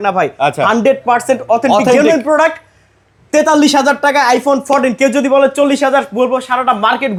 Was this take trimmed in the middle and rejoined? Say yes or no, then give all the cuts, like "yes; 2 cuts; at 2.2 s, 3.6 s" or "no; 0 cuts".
no; 0 cuts